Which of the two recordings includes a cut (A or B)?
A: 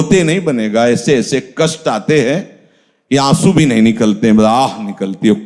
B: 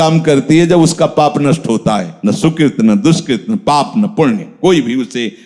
B